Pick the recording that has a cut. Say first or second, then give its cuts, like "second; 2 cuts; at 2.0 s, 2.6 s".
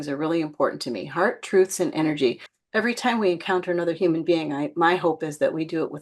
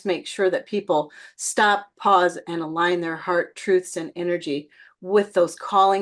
first; 1 cut; at 2.5 s